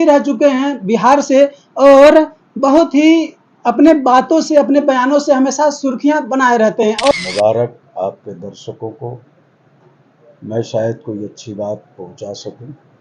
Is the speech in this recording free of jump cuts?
no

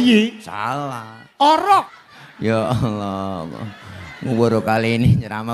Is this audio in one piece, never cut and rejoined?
no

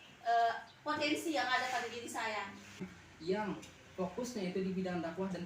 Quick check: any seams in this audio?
yes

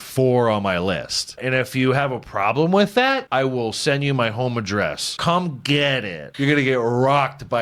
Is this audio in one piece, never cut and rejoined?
no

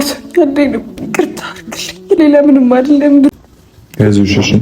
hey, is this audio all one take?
no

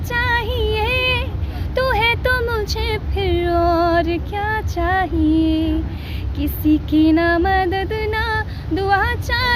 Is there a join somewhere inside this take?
no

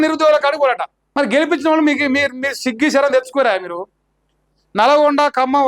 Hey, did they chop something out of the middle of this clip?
yes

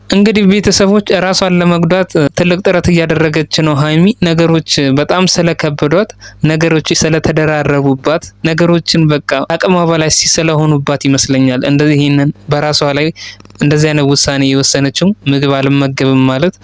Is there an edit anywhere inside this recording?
yes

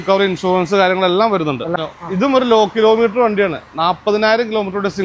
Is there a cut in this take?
yes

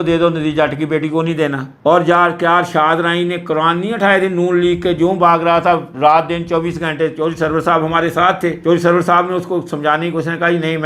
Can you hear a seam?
no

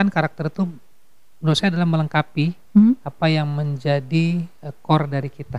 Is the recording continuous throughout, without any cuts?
yes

